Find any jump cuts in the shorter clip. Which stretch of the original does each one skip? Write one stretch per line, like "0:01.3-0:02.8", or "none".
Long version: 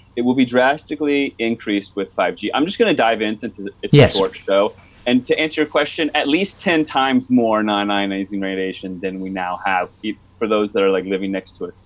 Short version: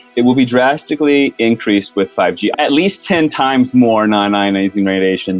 0:02.5-0:06.1